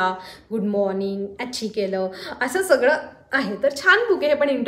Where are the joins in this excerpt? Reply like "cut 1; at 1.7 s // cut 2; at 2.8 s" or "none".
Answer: none